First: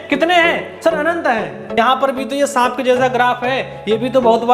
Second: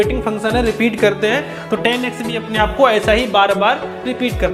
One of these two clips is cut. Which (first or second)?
first